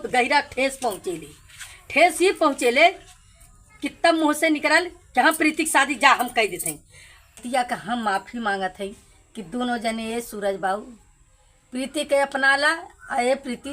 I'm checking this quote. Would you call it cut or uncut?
cut